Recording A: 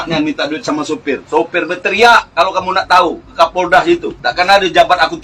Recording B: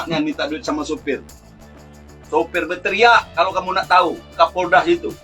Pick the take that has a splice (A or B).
A